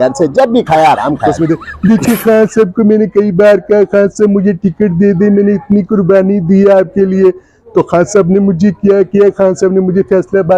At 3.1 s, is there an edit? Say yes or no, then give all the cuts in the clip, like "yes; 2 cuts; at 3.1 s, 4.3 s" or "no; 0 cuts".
no; 1 cut; at 1.3 s